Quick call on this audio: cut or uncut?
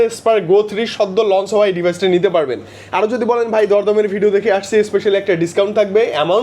uncut